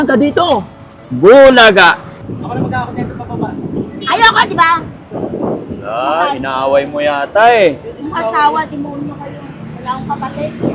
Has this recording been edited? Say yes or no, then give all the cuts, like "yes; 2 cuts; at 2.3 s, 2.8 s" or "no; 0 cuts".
yes; 1 cut; at 2.1 s